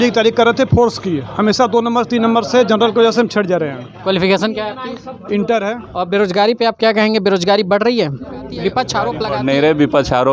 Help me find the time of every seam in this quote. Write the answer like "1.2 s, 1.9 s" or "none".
5.8 s, 9.2 s